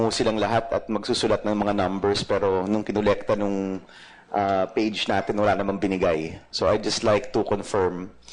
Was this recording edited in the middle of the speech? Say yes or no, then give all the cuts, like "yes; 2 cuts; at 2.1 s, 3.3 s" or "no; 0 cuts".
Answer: no; 0 cuts